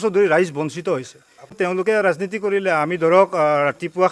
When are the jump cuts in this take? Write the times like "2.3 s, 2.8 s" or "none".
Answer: 1.6 s